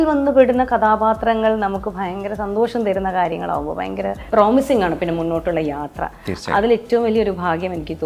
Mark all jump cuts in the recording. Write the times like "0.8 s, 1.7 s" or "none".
4.2 s